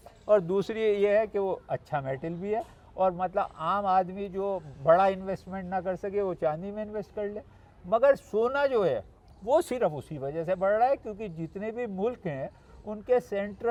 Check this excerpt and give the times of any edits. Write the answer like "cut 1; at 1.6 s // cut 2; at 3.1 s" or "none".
none